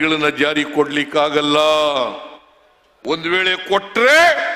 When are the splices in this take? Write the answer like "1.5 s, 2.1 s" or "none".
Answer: none